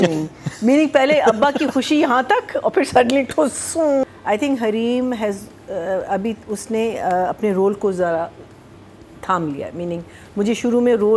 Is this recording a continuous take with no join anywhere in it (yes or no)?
no